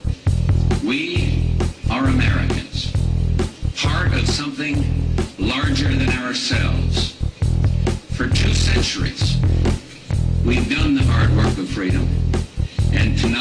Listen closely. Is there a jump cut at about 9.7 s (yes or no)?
no